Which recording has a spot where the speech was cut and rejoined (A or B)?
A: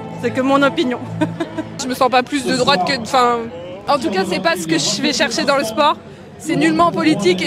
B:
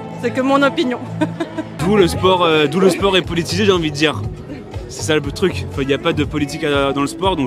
A